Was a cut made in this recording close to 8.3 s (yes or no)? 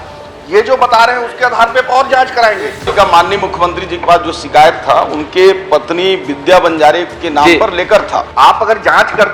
yes